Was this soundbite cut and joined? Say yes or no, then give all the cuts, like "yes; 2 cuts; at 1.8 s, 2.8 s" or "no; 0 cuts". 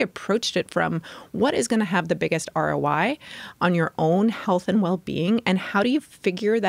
no; 0 cuts